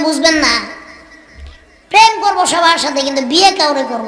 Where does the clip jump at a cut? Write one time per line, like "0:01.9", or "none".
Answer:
none